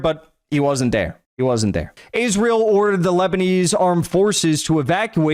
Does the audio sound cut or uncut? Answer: cut